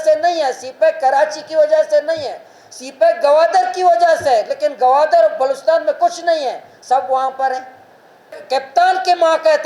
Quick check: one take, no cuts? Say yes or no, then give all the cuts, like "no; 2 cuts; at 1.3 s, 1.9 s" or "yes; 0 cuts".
no; 1 cut; at 8.4 s